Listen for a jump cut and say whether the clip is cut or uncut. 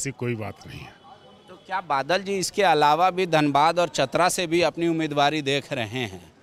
uncut